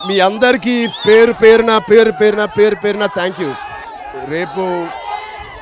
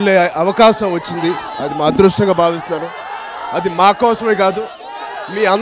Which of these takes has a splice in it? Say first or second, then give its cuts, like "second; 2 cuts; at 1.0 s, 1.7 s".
first; 1 cut; at 3.9 s